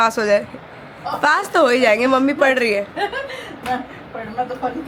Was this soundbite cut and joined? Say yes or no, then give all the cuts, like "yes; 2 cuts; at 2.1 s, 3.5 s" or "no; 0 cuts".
no; 0 cuts